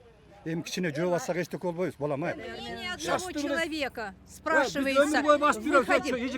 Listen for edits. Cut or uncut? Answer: cut